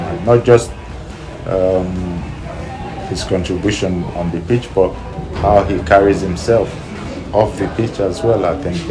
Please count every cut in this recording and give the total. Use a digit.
0